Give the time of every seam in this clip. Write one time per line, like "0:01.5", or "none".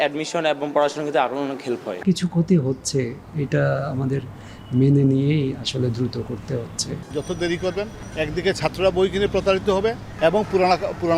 0:01.9
0:06.9
0:10.1